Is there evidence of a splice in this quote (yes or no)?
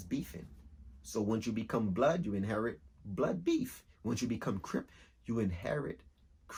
no